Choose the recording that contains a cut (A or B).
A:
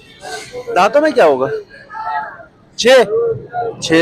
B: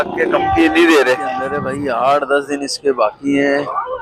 B